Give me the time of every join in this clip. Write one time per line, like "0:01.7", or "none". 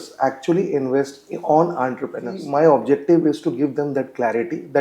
0:02.4